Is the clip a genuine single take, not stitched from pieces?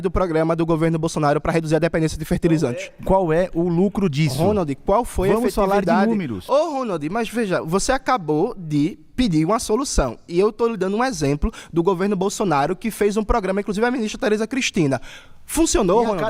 no; 1 cut; at 1.7 s

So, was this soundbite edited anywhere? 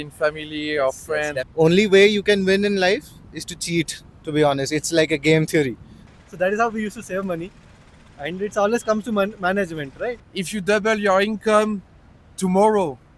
yes; 3 cuts; at 1.5 s, 6.0 s, 10.3 s

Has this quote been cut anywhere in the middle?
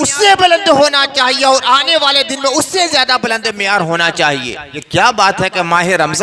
yes; 1 cut; at 4.7 s

